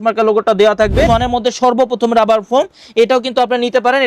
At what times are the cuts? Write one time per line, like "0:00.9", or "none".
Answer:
0:01.1

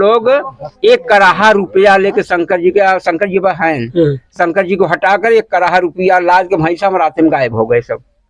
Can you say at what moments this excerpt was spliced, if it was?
none

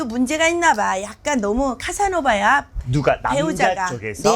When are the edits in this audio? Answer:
none

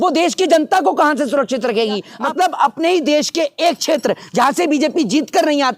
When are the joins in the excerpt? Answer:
0:02.1

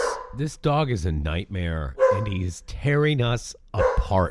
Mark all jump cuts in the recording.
none

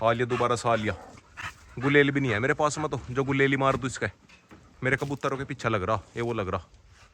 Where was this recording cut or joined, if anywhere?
none

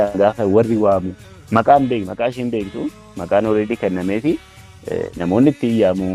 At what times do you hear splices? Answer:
none

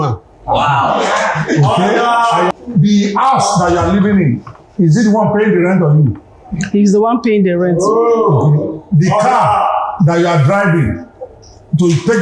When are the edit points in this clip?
0:02.5

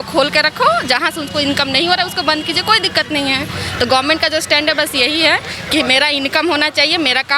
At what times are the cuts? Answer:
none

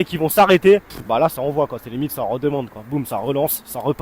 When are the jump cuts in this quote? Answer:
0:00.9

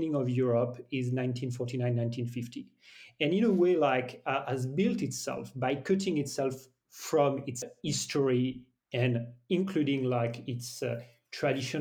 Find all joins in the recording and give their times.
0:07.6

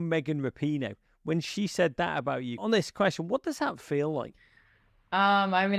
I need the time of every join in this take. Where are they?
0:02.6

